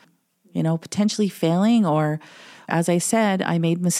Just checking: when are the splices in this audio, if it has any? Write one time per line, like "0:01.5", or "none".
0:02.7